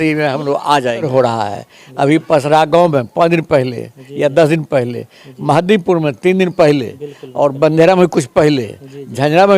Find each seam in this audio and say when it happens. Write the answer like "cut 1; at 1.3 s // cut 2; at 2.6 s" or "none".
cut 1; at 1.1 s